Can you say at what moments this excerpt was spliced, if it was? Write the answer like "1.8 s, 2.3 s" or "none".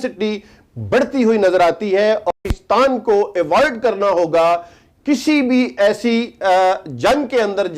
2.3 s

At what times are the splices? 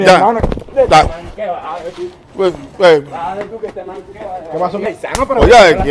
4.9 s

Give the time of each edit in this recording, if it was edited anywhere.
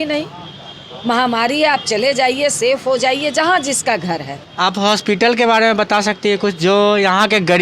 4.4 s

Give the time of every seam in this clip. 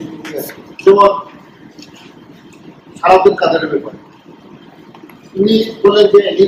none

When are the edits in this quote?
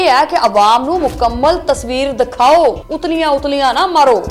2.9 s

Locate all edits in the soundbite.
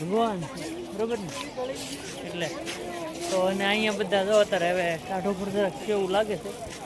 none

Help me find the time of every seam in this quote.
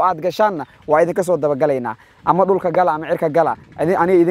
none

